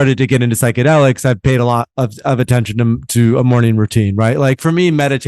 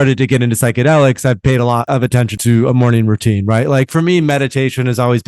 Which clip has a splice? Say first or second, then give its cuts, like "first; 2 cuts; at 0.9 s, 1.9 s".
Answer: second; 1 cut; at 2.2 s